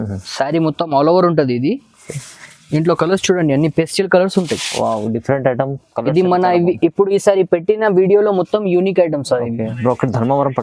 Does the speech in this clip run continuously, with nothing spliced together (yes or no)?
no